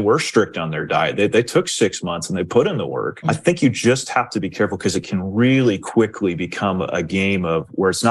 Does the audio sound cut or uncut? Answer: cut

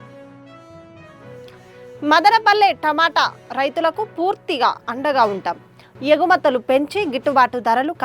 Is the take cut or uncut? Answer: cut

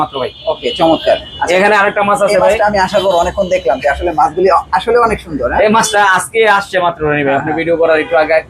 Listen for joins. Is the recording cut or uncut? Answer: uncut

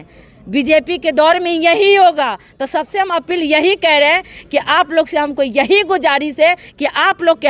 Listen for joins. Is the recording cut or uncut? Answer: uncut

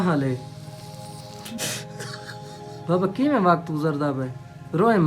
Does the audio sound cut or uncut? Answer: cut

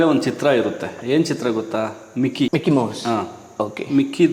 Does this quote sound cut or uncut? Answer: uncut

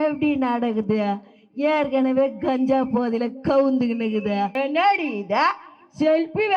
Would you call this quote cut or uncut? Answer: cut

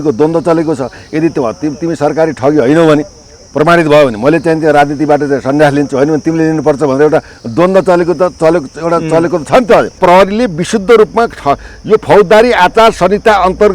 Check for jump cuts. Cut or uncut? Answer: cut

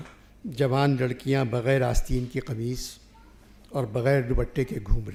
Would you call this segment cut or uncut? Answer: uncut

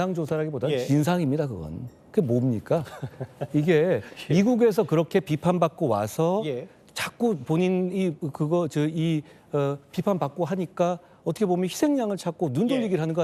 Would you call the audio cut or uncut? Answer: uncut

